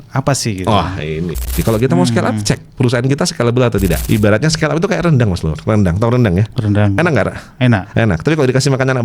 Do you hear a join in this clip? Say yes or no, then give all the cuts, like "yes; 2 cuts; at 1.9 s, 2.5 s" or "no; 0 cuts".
yes; 2 cuts; at 1.5 s, 4.0 s